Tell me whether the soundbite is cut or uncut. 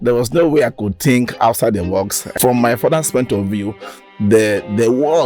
cut